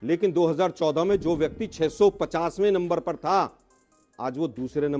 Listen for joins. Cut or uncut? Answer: uncut